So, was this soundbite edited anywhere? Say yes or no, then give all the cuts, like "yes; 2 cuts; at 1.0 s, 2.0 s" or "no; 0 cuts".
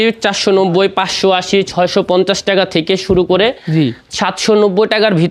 no; 0 cuts